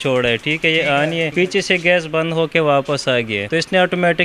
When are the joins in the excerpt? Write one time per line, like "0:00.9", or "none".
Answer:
0:01.3
0:03.4